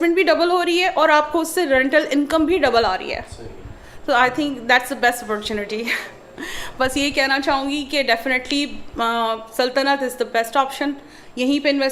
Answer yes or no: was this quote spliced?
no